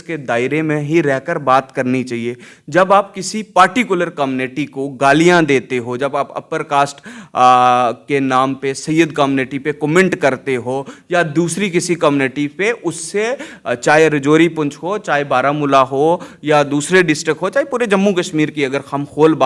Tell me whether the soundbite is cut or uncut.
uncut